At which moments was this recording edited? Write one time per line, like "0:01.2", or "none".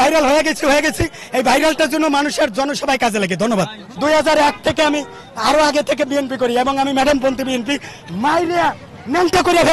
0:03.8
0:07.9